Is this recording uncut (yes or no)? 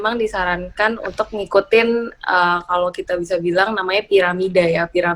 yes